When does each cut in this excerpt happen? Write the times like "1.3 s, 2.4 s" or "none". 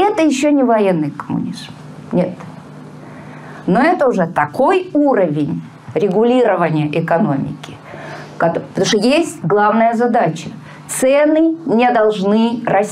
none